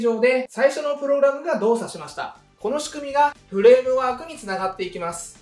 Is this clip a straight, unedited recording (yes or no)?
no